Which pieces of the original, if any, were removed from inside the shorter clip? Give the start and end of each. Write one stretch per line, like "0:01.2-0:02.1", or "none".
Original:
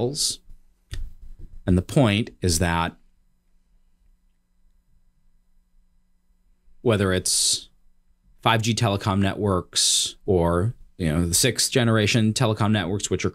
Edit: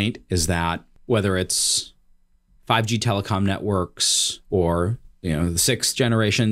0:03.0-0:06.7